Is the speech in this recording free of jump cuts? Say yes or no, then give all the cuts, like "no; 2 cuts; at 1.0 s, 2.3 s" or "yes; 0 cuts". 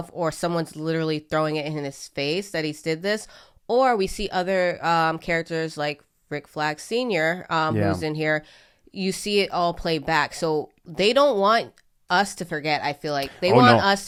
yes; 0 cuts